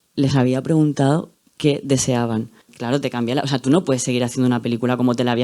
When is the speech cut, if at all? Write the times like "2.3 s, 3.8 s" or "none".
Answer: 2.7 s